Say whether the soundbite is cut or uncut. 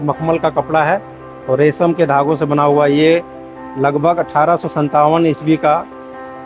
uncut